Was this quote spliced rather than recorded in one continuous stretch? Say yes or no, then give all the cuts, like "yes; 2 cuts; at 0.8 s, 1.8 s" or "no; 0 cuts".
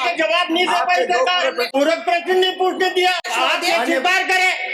yes; 2 cuts; at 1.6 s, 3.3 s